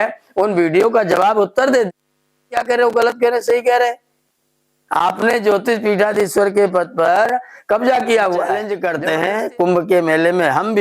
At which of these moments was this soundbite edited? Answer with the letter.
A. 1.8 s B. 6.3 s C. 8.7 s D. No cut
C